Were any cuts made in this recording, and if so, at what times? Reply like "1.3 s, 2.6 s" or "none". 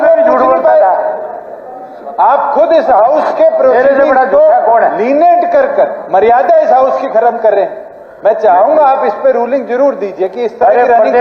none